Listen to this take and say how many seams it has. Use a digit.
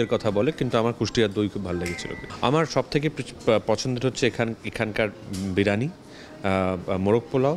1